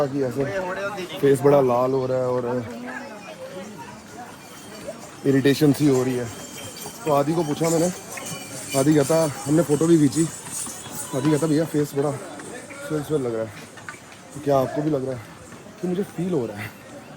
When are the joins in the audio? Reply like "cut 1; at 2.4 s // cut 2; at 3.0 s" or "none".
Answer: none